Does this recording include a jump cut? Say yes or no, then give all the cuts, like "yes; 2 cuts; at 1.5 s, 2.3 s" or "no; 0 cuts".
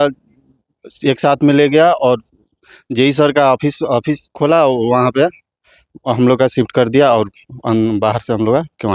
no; 0 cuts